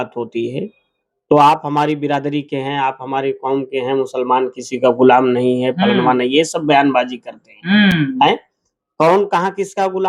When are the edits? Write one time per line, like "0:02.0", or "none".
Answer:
none